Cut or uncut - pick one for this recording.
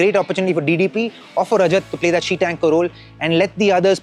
uncut